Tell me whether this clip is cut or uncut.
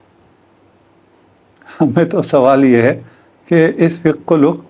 uncut